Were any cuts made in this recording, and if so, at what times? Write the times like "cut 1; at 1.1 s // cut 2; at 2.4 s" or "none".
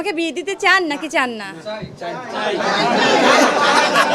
none